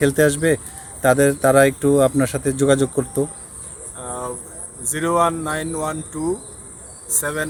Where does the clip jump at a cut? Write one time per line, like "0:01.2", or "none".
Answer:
none